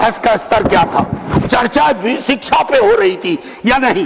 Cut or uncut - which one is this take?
uncut